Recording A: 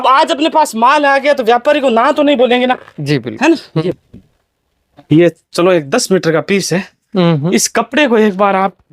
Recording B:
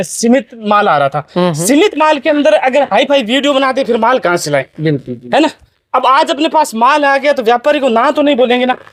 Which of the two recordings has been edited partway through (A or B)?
A